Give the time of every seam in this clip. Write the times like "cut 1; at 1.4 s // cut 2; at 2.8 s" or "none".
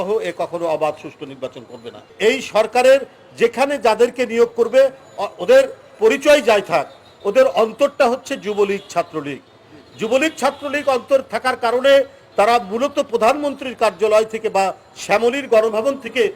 cut 1; at 2.1 s